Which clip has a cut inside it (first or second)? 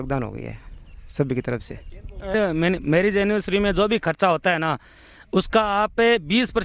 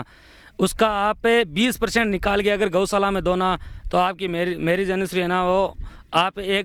first